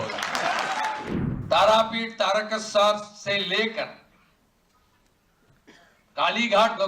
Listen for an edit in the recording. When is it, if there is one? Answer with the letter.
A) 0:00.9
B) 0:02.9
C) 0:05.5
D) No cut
A